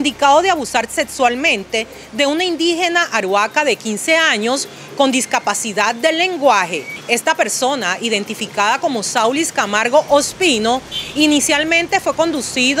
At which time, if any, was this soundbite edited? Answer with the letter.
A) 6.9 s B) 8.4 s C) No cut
A